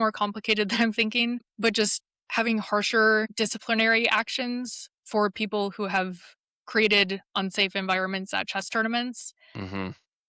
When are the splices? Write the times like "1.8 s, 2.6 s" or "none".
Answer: 1.5 s, 3.3 s